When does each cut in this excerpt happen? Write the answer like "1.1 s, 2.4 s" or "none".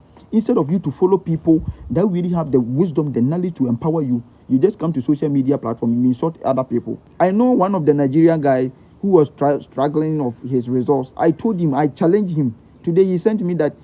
7.0 s